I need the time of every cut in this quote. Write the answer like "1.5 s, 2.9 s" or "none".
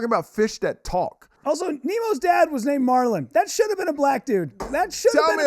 1.3 s